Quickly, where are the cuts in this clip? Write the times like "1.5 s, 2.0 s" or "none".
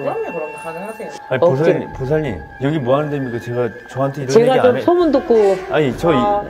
1.0 s